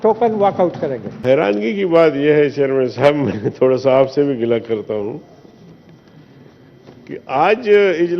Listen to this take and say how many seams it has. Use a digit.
1